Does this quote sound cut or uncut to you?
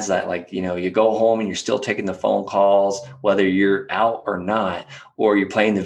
uncut